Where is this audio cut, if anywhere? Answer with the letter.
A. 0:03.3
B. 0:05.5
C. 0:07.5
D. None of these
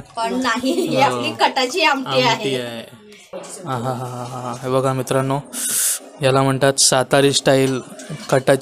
A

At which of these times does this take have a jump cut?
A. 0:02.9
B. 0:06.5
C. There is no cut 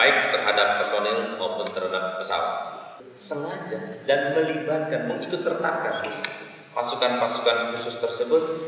A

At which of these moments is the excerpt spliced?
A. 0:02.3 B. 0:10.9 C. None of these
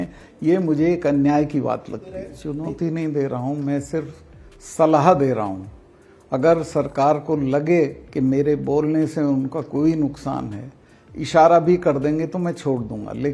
A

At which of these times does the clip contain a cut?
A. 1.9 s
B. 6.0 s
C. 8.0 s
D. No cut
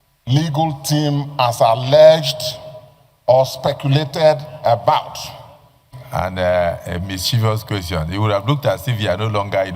B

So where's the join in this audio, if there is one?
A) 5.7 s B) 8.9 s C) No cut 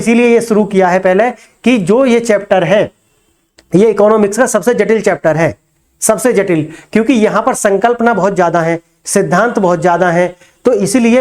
C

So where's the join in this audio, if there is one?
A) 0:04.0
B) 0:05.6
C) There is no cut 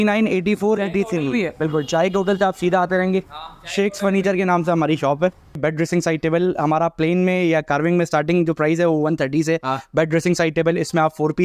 B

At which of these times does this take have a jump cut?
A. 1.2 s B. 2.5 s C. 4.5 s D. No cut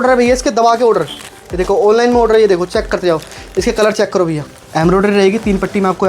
C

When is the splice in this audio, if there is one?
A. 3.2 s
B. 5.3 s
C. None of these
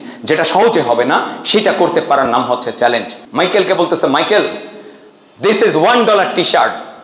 A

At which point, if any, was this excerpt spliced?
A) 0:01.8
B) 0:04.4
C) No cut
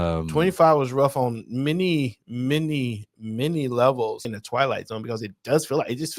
B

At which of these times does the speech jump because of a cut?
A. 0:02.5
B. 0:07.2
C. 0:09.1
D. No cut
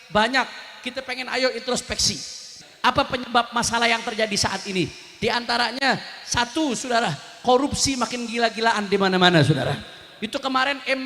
A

